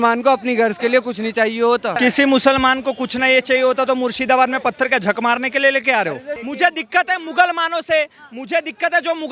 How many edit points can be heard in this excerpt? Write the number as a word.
two